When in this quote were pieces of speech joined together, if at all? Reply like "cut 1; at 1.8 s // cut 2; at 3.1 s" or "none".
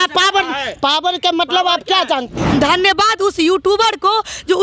cut 1; at 2.3 s